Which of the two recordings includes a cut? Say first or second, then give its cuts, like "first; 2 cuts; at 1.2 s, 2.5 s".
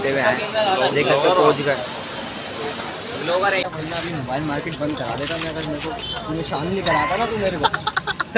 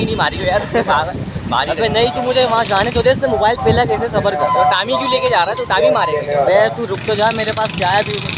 first; 1 cut; at 3.6 s